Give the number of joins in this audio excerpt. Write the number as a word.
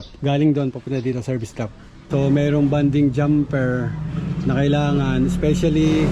one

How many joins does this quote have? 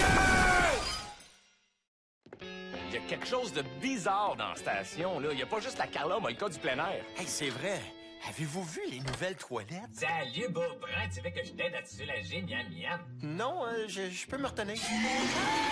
one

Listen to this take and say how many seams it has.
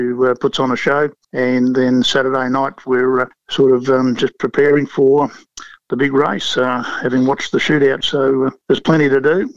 three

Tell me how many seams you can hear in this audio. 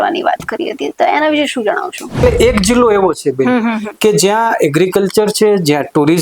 one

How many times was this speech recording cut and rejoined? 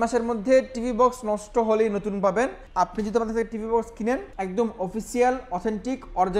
two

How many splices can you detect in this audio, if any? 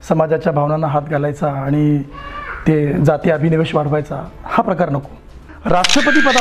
one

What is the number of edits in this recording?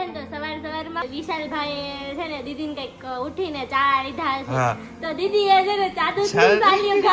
one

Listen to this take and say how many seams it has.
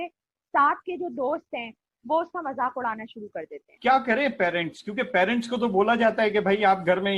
one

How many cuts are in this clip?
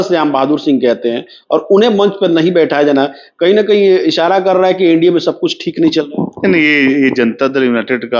zero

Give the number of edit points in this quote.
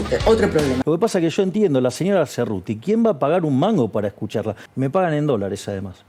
two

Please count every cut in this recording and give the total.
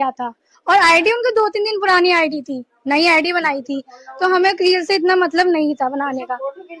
zero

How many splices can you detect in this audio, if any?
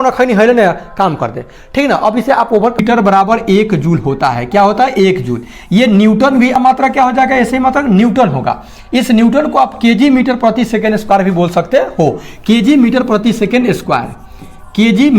two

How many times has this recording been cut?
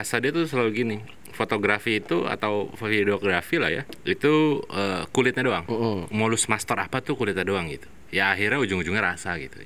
two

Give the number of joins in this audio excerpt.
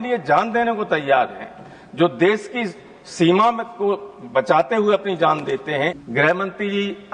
one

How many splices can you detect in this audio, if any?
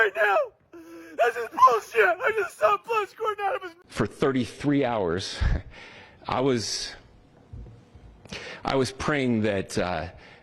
one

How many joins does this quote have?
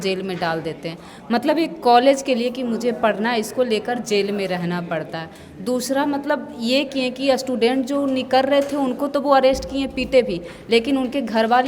zero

